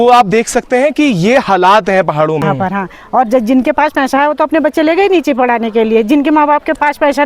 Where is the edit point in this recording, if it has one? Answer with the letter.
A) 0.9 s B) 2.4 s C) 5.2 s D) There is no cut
B